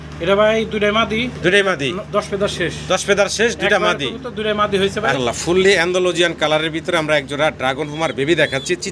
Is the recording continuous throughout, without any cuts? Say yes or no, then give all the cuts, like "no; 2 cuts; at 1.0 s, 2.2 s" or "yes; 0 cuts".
no; 1 cut; at 5.2 s